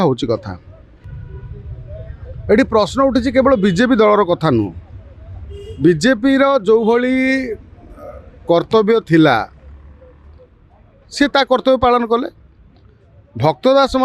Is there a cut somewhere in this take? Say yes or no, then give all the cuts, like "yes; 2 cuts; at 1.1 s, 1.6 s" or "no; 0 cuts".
no; 0 cuts